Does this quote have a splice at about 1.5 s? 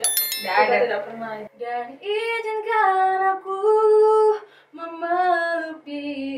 yes; 1 cut; at 1.5 s

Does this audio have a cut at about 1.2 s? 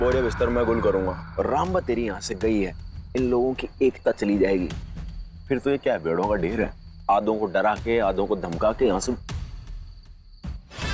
yes; 1 cut; at 1.2 s

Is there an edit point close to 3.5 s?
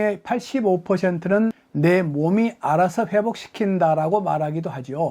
no; 1 cut; at 1.6 s

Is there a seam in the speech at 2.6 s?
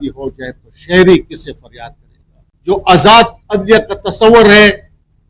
yes; 1 cut; at 2.6 s

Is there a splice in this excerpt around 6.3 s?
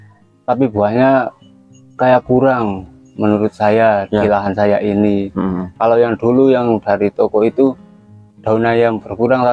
no; 0 cuts

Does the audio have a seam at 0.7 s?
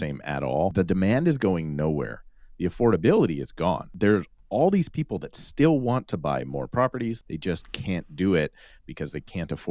yes; 3 cuts; at 0.7 s, 3.9 s, 7.2 s

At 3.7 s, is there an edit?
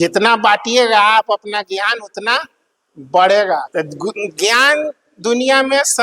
yes; 1 cut; at 3.7 s

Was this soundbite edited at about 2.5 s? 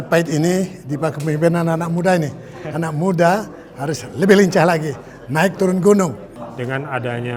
no; 1 cut; at 6.3 s

